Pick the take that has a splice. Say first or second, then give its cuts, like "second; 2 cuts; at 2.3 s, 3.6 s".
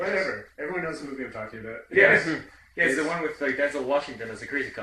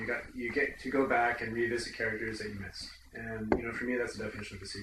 first; 1 cut; at 1.0 s